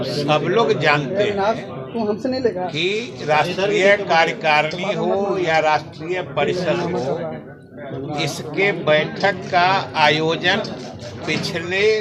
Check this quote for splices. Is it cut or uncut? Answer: uncut